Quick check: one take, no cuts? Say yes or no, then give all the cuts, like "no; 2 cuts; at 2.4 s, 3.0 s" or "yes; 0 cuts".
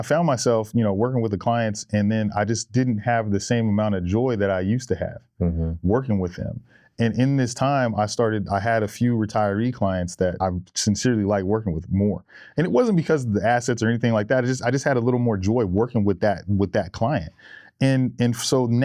no; 1 cut; at 10.4 s